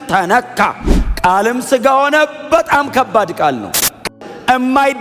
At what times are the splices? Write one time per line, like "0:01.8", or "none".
0:04.0